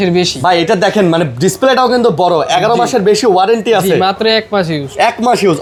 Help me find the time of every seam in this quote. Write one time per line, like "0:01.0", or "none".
none

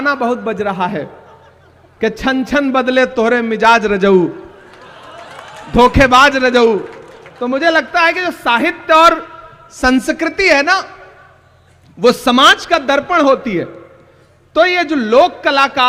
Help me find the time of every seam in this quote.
none

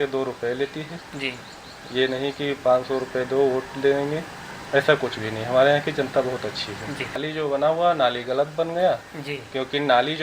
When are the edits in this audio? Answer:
0:07.3

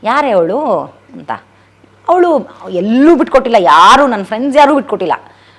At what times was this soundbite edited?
none

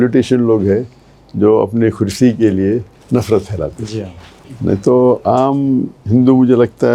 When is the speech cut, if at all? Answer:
none

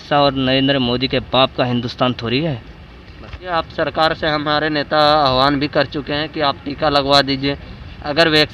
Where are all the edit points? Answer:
0:03.5

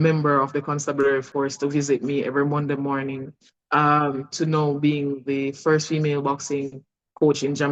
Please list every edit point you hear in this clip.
none

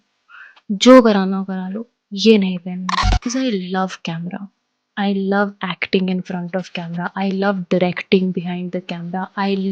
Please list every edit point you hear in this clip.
0:03.2

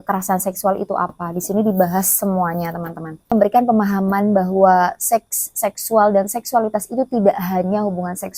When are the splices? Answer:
0:03.3

